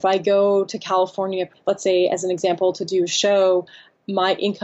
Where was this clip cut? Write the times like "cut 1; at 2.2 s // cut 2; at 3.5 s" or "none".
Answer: cut 1; at 1.6 s